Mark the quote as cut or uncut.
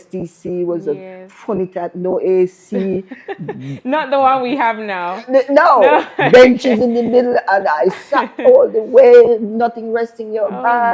uncut